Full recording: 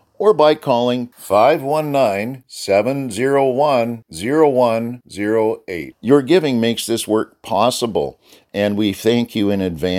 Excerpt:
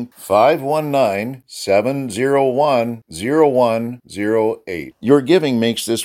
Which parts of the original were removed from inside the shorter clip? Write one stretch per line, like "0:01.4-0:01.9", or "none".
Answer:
none